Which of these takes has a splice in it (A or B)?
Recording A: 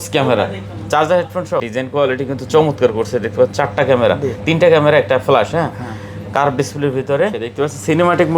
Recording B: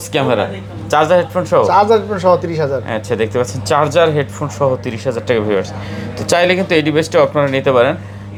A